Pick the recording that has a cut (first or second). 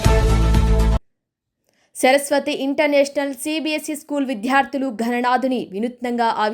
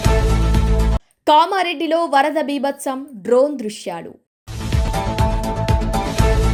first